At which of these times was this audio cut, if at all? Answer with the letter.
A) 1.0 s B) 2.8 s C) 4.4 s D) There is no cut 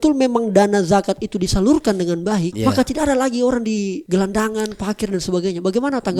D